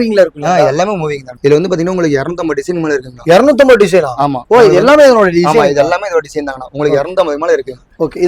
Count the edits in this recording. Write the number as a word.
one